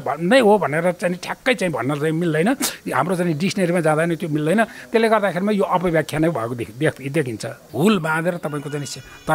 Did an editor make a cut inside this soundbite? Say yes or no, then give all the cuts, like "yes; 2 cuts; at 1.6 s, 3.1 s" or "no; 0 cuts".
yes; 1 cut; at 7.6 s